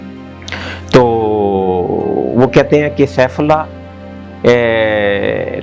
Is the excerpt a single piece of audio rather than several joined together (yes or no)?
yes